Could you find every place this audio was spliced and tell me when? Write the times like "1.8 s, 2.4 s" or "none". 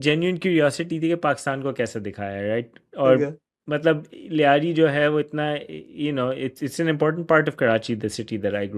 none